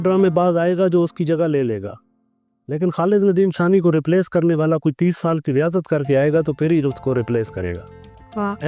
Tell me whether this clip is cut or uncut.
uncut